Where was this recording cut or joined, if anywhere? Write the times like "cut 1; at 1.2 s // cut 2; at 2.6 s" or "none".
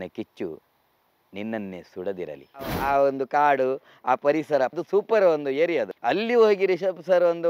cut 1; at 2.8 s // cut 2; at 4.8 s // cut 3; at 5.9 s